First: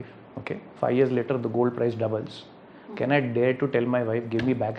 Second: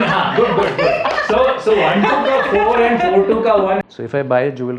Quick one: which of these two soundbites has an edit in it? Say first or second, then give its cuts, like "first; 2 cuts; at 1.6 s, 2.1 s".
second; 1 cut; at 3.9 s